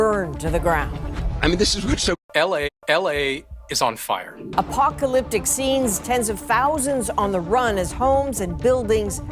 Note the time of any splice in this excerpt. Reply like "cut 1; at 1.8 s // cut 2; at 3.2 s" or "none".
cut 1; at 2.2 s